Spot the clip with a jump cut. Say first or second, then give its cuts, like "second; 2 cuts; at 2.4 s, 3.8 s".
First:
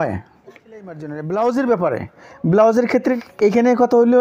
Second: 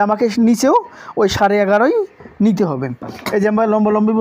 first; 2 cuts; at 0.9 s, 3.1 s